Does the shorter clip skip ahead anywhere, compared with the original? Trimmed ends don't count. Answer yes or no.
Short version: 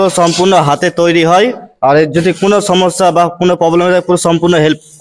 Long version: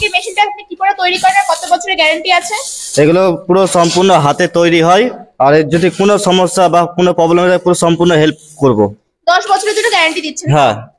no